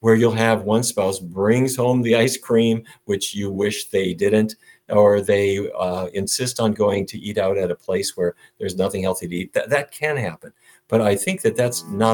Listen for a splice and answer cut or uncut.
uncut